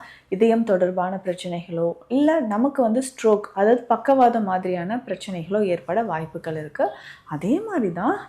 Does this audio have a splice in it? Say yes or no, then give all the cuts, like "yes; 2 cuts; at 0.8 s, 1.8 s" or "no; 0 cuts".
no; 0 cuts